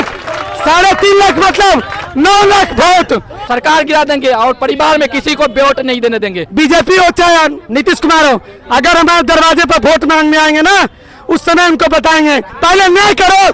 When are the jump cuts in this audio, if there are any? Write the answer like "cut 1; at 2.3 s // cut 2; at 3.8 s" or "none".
cut 1; at 3.4 s // cut 2; at 6.4 s // cut 3; at 7.7 s // cut 4; at 12.5 s